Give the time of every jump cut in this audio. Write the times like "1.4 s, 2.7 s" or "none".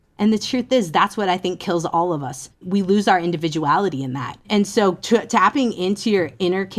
2.6 s, 4.5 s